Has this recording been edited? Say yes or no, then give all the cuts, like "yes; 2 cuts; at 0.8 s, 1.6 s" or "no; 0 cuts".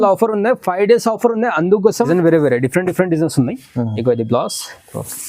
yes; 1 cut; at 2.1 s